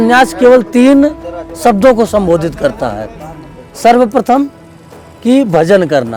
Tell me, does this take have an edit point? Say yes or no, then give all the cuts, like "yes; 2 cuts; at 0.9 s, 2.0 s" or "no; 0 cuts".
no; 0 cuts